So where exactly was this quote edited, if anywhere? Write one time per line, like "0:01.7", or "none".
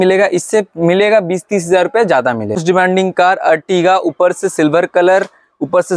0:02.6